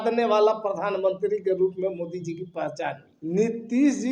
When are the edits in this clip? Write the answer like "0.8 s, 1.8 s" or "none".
3.1 s

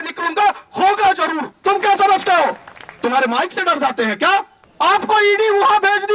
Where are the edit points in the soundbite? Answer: 1.5 s, 4.6 s

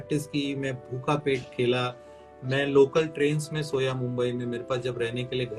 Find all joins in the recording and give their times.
none

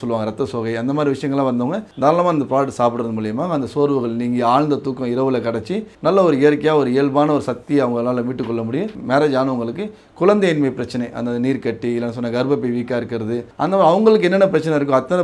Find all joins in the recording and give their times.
9.0 s

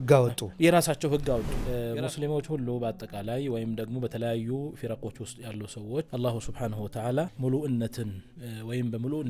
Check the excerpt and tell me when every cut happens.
1.6 s, 6.1 s, 7.3 s

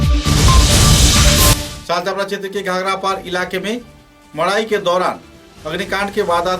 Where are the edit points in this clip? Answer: 1.6 s

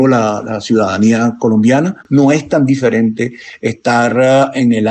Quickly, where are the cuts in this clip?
2.0 s

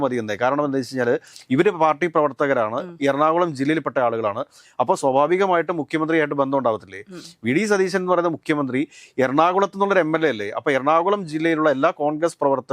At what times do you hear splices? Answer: none

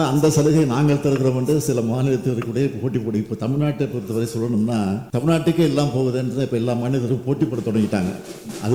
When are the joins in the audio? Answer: 5.0 s

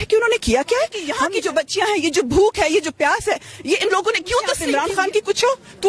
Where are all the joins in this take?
1.1 s, 4.6 s

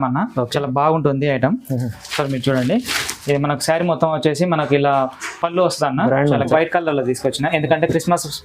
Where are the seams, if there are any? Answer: 6.5 s

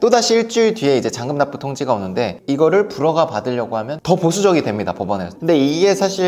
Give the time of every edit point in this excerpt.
2.4 s, 3.9 s, 5.3 s

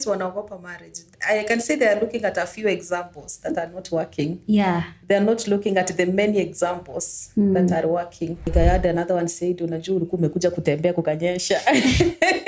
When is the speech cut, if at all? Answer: 1.0 s, 8.5 s

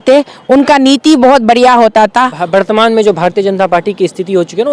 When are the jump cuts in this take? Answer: 2.4 s

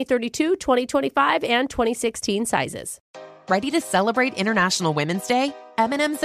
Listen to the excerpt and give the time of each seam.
3.0 s

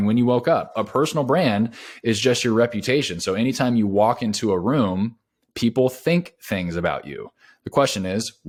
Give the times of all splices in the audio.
none

